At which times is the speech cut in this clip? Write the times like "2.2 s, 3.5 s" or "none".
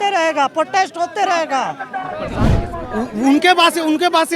2.4 s